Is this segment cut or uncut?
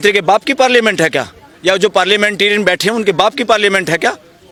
uncut